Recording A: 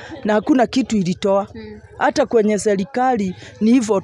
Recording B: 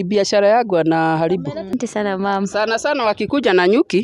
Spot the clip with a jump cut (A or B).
B